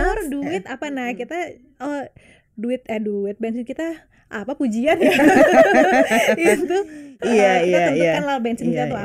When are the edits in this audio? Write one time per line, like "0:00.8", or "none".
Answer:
none